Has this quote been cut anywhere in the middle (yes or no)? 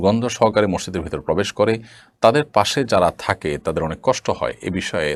no